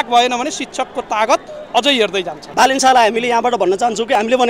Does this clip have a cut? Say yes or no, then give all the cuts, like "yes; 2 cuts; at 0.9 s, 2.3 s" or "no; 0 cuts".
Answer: yes; 1 cut; at 2.5 s